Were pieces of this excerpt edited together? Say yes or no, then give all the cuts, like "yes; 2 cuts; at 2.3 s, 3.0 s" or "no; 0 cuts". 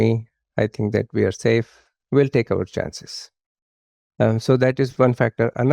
no; 0 cuts